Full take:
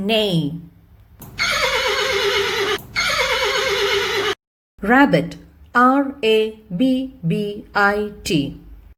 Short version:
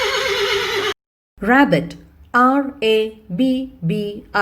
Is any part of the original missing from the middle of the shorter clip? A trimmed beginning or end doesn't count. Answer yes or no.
yes